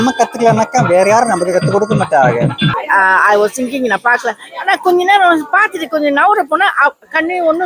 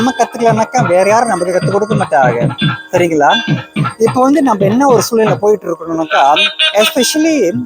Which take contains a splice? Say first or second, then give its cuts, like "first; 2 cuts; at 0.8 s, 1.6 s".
first; 1 cut; at 2.8 s